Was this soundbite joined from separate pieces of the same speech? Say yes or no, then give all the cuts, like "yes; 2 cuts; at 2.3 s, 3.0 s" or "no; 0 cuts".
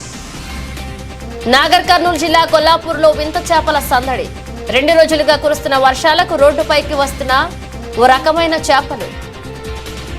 yes; 1 cut; at 1.0 s